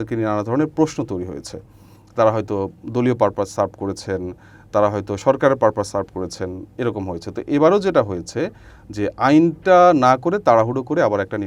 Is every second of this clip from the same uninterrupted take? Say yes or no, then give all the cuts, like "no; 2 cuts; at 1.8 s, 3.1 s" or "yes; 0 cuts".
yes; 0 cuts